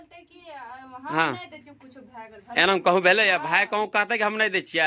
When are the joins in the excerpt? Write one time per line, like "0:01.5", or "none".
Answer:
none